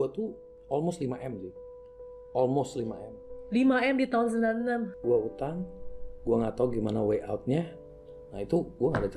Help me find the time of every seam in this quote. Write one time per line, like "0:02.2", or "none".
0:05.0
0:07.8